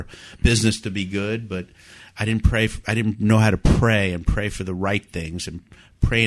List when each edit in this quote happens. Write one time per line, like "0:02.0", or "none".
none